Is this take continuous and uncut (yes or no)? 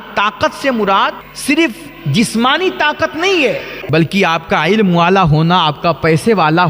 no